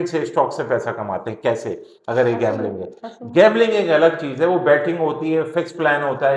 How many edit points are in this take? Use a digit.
0